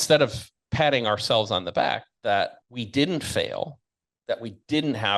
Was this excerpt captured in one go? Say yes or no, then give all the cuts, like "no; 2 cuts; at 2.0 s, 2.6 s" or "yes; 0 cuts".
no; 1 cut; at 2.6 s